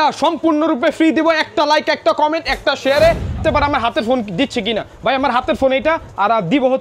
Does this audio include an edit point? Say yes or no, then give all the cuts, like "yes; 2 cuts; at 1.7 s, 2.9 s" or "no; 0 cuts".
yes; 1 cut; at 3.4 s